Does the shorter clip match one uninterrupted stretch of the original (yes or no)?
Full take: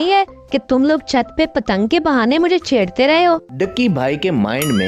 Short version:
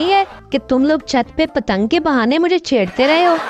yes